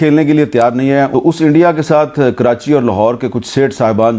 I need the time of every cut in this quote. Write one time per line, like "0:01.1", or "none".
0:01.1